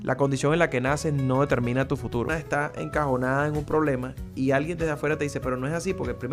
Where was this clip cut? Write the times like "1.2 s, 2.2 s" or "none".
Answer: 2.3 s